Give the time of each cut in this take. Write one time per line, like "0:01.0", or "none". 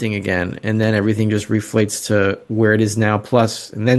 none